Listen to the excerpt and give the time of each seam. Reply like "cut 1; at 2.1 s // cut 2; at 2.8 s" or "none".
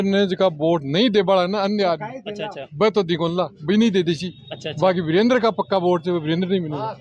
none